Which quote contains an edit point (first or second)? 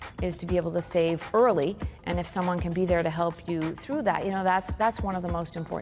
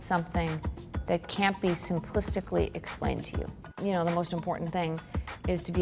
second